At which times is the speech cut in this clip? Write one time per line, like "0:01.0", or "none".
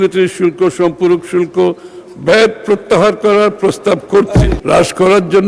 0:04.5